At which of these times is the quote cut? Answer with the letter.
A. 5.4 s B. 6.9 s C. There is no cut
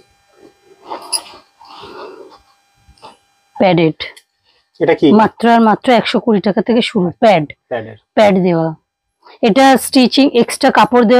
C